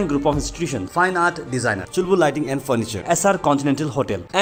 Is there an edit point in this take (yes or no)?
no